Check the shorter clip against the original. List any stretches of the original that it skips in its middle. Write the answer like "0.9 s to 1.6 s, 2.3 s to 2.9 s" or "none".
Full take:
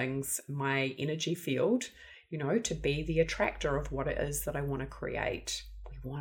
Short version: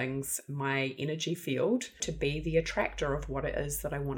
2.1 s to 2.7 s